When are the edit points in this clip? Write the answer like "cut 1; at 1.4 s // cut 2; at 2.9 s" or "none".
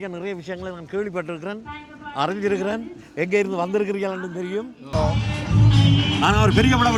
cut 1; at 4.9 s